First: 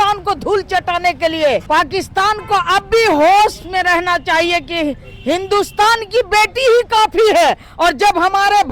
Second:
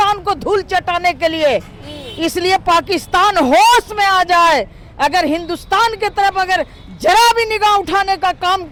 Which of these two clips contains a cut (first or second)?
first